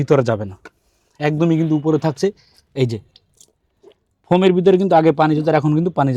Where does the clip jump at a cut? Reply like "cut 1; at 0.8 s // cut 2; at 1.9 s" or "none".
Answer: none

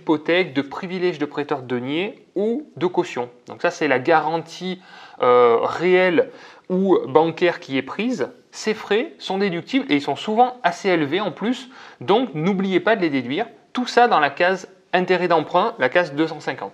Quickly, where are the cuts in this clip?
none

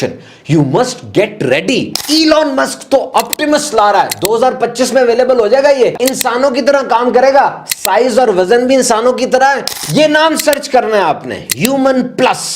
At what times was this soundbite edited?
cut 1; at 2.0 s // cut 2; at 6.0 s // cut 3; at 9.7 s

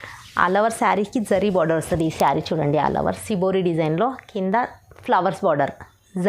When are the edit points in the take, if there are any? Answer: none

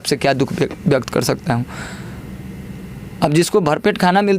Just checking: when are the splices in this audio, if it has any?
none

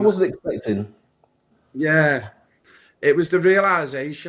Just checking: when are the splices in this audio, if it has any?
cut 1; at 1.6 s

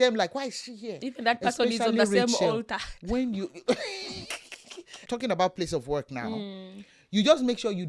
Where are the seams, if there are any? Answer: cut 1; at 5.0 s

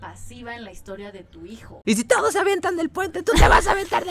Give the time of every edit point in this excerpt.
cut 1; at 1.7 s

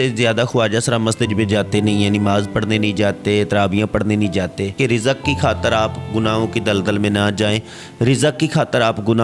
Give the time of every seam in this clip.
cut 1; at 4.8 s

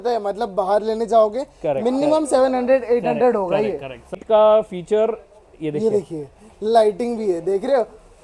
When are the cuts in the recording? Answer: cut 1; at 4.2 s

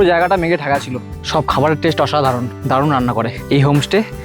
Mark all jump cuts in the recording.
cut 1; at 1.2 s // cut 2; at 2.5 s // cut 3; at 3.4 s

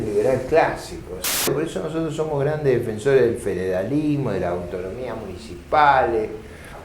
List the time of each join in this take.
cut 1; at 1.5 s

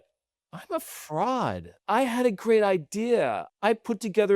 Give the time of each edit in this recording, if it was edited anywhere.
cut 1; at 1.7 s // cut 2; at 3.5 s

